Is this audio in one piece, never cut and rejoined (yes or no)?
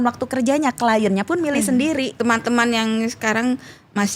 no